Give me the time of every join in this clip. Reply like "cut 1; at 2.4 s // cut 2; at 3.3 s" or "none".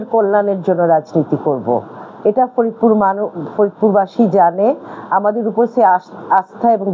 none